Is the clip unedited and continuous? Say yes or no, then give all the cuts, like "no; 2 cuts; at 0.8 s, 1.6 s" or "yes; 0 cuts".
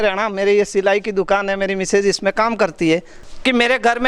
no; 1 cut; at 3.2 s